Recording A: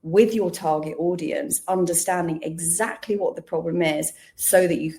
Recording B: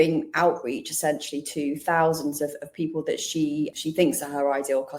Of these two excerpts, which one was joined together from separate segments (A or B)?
B